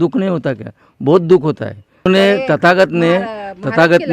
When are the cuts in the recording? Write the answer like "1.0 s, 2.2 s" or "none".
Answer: 2.1 s